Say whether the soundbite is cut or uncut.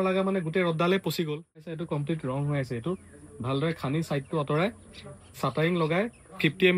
cut